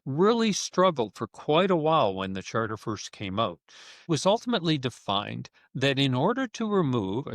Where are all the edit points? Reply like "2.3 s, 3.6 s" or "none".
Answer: 4.1 s

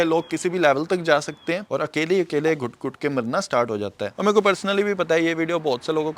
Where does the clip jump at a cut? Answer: 1.7 s, 4.1 s

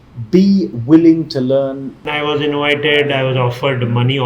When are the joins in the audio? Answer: 2.0 s

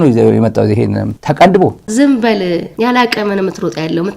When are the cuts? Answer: 1.1 s, 1.8 s

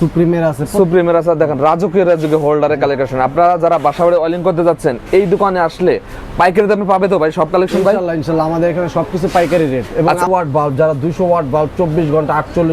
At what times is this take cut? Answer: 10.3 s

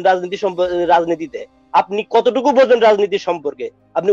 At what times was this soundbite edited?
none

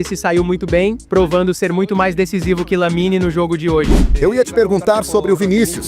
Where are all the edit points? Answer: 1.0 s, 4.0 s

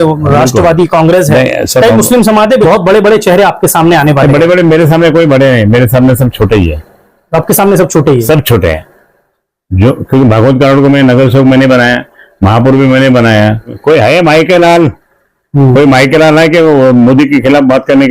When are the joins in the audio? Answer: 2.6 s, 13.8 s

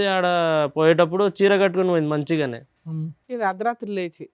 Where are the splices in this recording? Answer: none

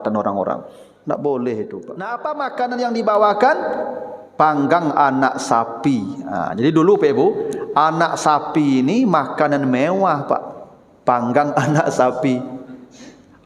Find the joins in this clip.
2.0 s

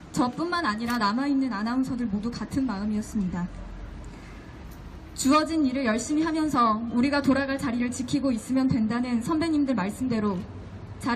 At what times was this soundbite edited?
4.9 s

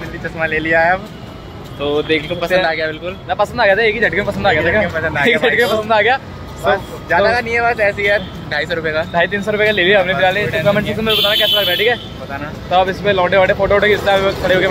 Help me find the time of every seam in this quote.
none

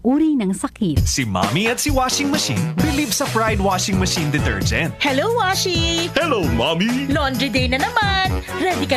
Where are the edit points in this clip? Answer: 1.0 s

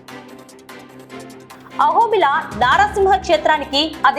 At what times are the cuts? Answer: 1.5 s

